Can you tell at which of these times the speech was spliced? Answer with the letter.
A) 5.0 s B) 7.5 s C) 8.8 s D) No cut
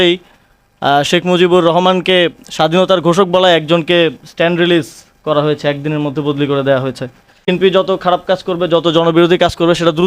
B